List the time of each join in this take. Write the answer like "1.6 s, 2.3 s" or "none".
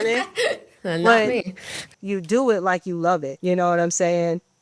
1.9 s, 3.3 s